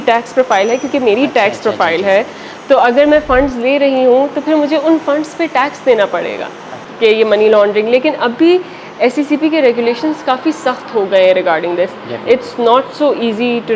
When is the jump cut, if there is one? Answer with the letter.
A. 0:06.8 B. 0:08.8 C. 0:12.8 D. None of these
A